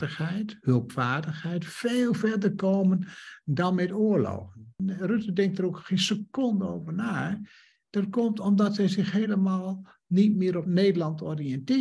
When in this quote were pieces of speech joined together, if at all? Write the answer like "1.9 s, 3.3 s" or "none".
4.7 s